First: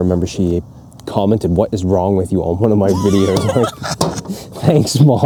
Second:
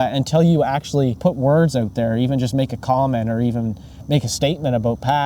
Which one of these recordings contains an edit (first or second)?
second